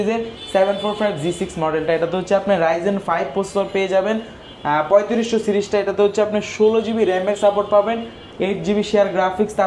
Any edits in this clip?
no; 0 cuts

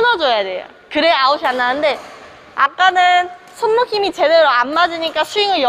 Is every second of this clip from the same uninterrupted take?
yes; 0 cuts

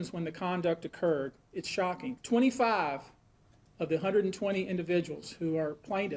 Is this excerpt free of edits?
no; 1 cut; at 1.8 s

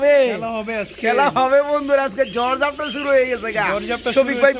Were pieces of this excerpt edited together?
no; 0 cuts

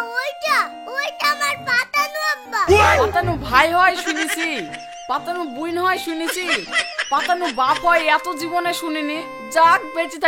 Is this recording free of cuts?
yes; 0 cuts

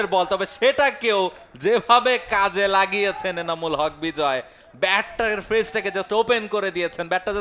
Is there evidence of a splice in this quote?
no; 0 cuts

